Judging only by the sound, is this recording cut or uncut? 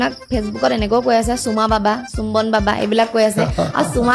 uncut